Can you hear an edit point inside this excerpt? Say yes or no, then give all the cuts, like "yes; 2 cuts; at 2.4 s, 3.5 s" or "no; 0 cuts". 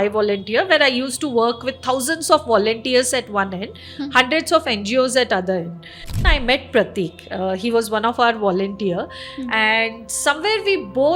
yes; 1 cut; at 6.1 s